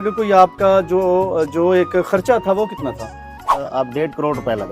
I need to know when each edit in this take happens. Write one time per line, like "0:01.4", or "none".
0:03.6

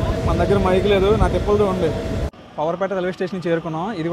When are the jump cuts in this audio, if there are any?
0:02.3

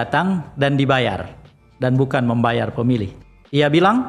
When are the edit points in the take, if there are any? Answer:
0:03.2

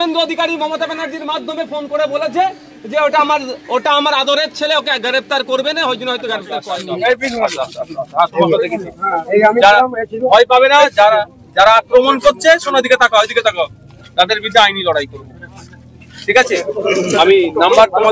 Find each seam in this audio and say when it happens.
0:06.7

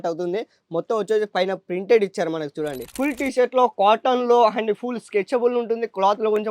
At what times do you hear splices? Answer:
0:02.8

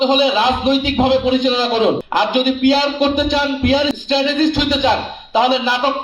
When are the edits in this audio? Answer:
0:04.0

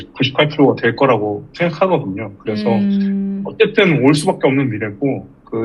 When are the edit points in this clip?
none

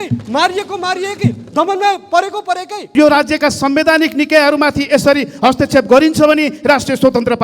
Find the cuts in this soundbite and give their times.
0:02.9

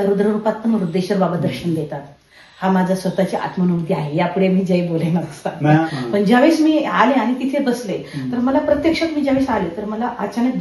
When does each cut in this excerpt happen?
0:05.8

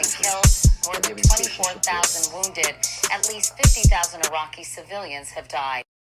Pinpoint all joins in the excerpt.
none

